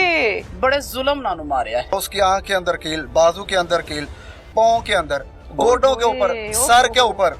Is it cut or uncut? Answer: cut